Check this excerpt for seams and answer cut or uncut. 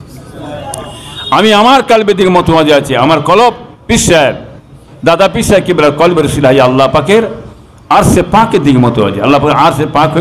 uncut